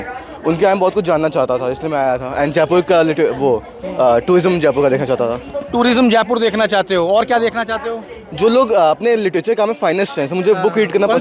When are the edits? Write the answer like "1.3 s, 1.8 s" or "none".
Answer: none